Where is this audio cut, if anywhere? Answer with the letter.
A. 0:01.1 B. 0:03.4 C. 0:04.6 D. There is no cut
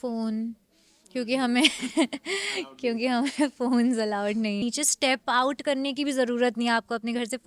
C